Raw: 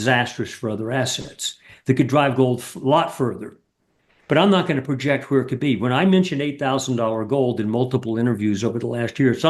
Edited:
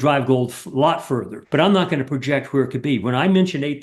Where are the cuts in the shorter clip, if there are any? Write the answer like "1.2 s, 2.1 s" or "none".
1.3 s